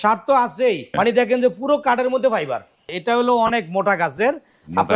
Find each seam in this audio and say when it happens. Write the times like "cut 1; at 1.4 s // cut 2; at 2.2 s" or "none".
cut 1; at 0.9 s // cut 2; at 2.9 s

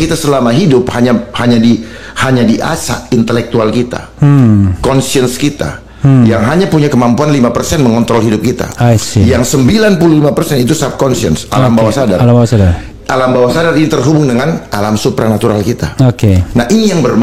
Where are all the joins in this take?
none

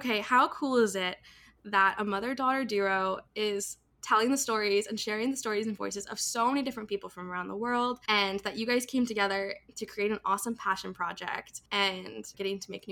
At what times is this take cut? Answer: cut 1; at 8.0 s // cut 2; at 11.5 s

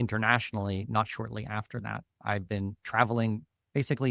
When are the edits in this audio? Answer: cut 1; at 2.1 s

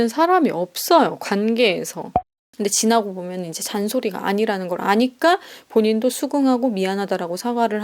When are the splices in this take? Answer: cut 1; at 2.2 s

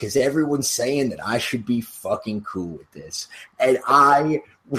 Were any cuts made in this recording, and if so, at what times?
none

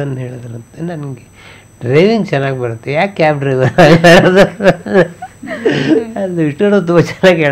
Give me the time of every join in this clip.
none

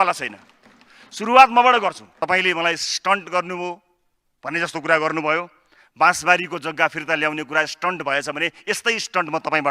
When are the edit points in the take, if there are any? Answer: cut 1; at 2.1 s

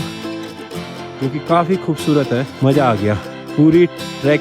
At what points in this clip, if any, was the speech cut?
cut 1; at 2.5 s // cut 2; at 3.3 s

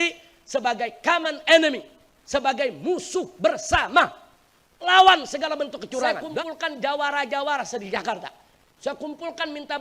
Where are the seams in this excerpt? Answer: cut 1; at 6.4 s

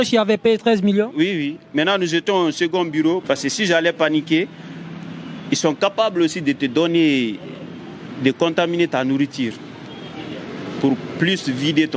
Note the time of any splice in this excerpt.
cut 1; at 3.2 s

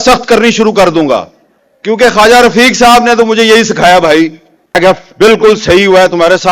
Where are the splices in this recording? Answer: cut 1; at 4.8 s

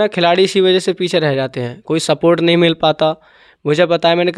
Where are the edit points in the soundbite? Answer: none

